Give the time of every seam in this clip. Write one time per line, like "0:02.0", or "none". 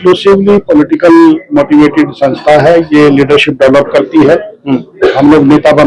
none